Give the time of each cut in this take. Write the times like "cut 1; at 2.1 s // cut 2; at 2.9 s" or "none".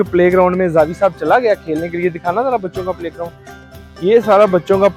none